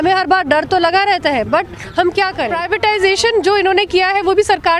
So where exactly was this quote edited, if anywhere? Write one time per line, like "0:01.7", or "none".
0:02.6